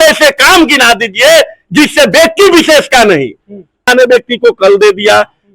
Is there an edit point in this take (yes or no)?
yes